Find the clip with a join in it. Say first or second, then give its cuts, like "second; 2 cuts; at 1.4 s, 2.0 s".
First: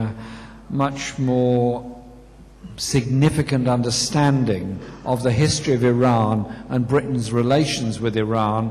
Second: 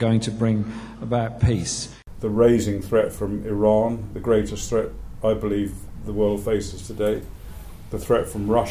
second; 1 cut; at 1.9 s